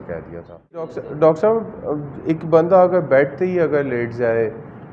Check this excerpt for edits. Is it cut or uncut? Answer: cut